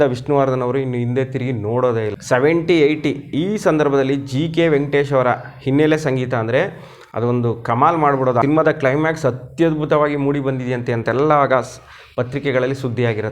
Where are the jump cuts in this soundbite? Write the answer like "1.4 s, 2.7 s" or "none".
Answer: 2.1 s, 8.4 s